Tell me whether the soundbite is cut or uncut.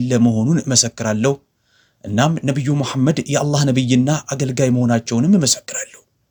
uncut